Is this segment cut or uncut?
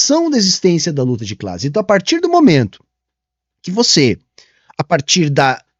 uncut